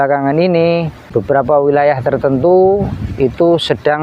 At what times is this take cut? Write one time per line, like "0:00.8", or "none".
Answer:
0:01.0